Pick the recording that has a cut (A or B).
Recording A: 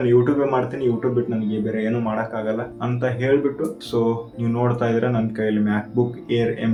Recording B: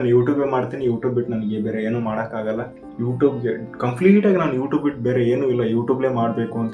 B